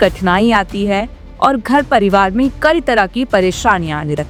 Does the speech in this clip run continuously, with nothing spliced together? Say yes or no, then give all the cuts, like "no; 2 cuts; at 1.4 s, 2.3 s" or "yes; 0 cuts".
yes; 0 cuts